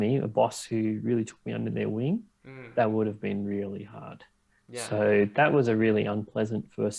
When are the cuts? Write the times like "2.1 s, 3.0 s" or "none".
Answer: none